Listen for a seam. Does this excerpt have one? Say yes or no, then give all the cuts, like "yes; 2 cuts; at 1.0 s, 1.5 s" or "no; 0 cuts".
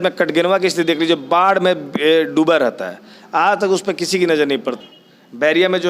yes; 1 cut; at 4.8 s